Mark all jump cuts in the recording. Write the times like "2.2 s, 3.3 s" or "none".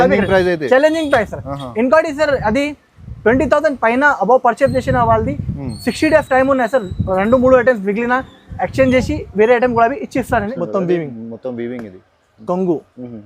10.5 s